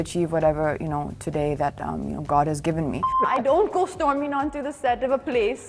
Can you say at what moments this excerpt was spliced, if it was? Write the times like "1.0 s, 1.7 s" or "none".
3.1 s